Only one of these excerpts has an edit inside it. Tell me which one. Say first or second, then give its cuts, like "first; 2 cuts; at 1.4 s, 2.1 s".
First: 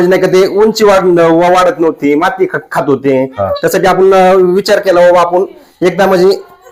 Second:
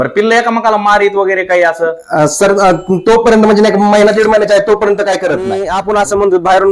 second; 1 cut; at 5.7 s